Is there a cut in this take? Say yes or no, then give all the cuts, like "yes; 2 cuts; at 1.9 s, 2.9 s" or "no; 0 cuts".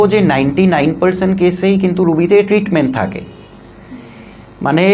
no; 0 cuts